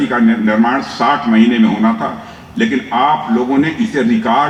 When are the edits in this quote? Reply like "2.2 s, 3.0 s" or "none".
none

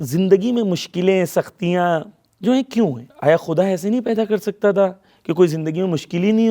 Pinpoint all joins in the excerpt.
3.1 s

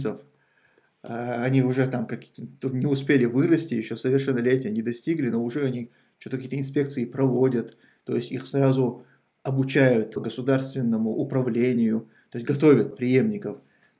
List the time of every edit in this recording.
10.2 s, 12.9 s

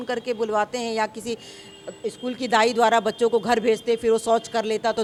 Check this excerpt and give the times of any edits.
none

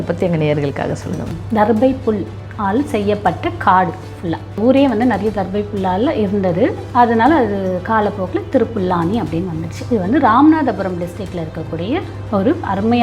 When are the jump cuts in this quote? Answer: 1.4 s, 4.6 s

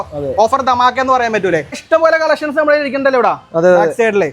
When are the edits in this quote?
1.8 s

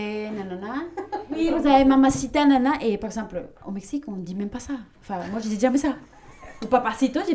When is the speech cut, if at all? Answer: 1.3 s

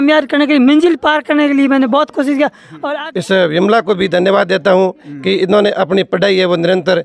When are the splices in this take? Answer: 2.8 s

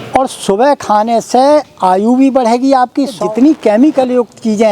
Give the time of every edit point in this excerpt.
3.2 s

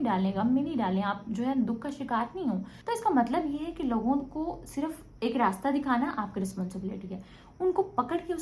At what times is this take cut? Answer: 2.7 s, 5.0 s

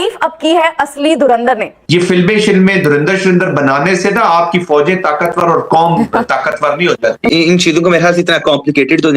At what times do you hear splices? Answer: 1.7 s, 7.4 s

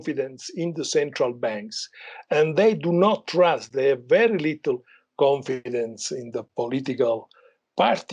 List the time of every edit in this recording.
none

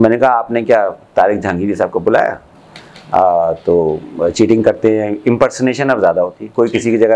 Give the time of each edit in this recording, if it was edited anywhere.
2.6 s

